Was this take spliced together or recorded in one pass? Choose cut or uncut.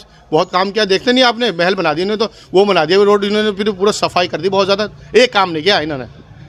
uncut